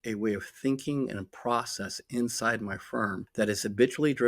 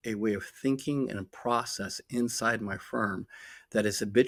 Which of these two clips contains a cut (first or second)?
first